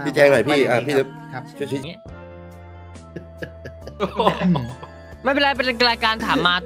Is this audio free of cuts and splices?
no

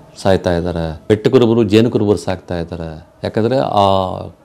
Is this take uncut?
no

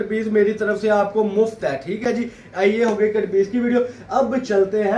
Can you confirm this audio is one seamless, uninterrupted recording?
yes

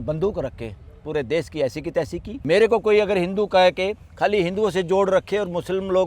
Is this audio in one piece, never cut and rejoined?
no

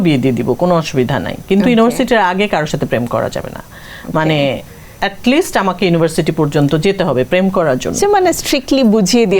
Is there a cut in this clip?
no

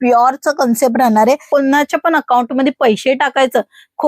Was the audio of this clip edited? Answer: yes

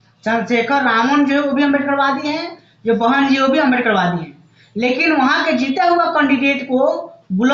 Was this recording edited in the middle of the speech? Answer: no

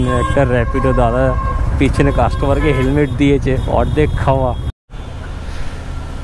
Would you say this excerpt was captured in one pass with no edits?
no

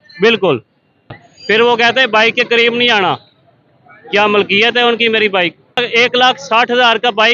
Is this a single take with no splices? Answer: no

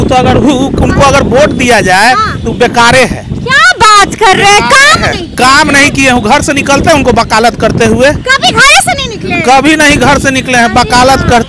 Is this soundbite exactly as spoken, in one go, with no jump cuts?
yes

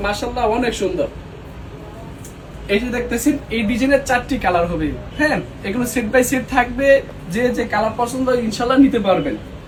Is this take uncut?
yes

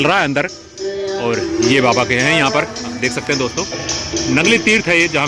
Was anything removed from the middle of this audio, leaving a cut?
no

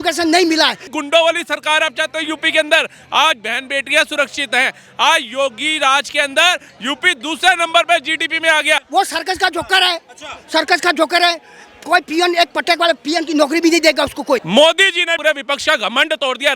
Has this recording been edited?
yes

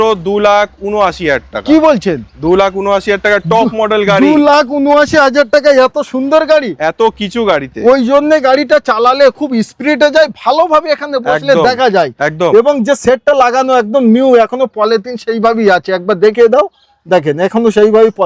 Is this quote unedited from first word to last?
yes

